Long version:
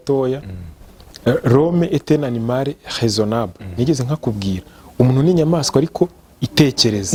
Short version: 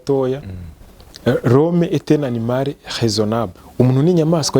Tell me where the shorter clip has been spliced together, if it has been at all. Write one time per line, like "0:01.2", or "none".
0:03.6